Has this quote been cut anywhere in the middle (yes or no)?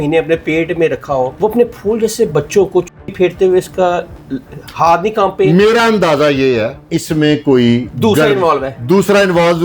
yes